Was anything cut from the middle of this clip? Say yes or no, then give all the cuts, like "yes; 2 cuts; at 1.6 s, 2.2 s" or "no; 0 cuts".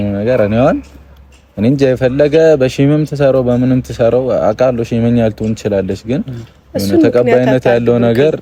no; 0 cuts